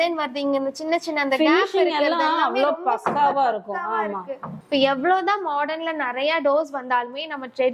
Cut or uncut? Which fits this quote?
uncut